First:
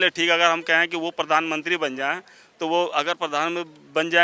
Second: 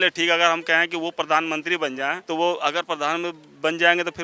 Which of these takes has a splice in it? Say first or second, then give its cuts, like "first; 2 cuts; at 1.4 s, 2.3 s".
second; 1 cut; at 2.2 s